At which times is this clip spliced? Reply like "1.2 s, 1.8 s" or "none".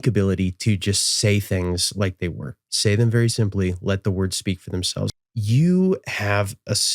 5.1 s